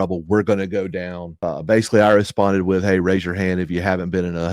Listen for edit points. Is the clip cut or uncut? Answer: cut